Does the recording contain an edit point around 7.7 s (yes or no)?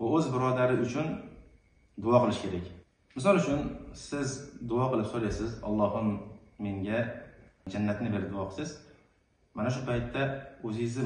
yes